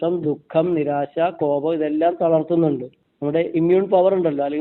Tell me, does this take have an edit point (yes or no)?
yes